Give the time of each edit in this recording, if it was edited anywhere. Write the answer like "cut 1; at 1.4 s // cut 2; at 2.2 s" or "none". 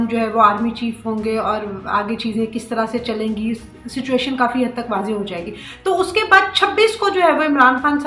none